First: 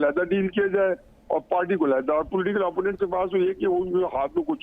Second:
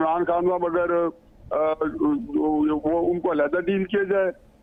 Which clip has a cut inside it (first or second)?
first